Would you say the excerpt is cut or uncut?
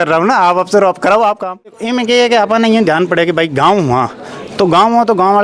cut